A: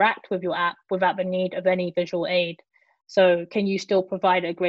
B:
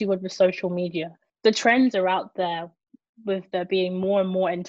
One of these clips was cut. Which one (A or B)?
B